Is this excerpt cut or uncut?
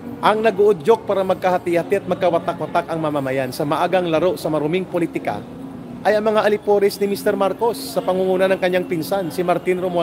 uncut